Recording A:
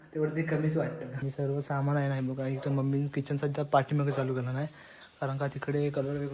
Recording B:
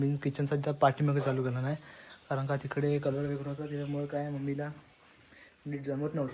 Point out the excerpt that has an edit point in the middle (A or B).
A